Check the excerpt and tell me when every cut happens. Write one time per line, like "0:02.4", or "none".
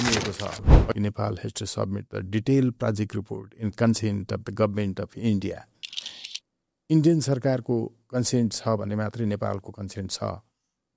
0:00.9